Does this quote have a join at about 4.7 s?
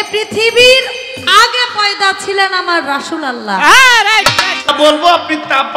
yes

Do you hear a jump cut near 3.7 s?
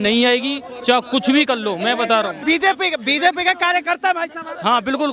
no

